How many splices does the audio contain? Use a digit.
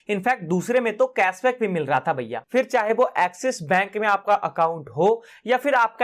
1